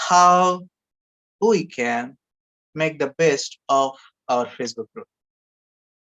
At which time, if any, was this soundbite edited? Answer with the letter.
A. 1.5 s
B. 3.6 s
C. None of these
C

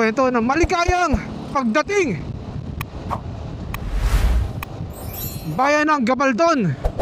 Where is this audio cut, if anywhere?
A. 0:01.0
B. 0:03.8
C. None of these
C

